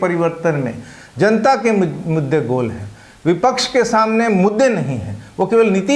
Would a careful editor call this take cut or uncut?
uncut